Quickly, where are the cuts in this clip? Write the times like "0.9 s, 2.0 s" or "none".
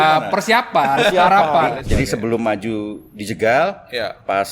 1.7 s